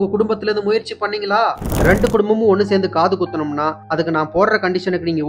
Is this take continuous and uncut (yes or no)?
no